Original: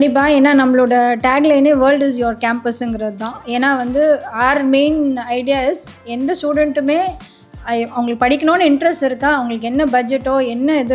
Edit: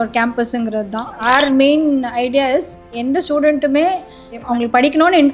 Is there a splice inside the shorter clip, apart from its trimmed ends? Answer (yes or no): yes